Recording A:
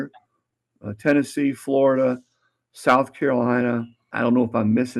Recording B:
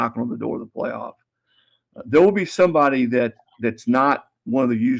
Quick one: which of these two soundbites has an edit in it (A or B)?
A